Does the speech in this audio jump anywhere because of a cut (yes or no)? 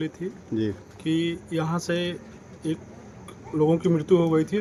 no